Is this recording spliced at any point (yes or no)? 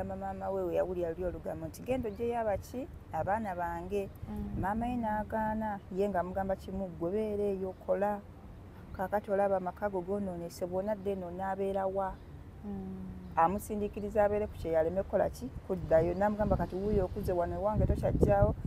no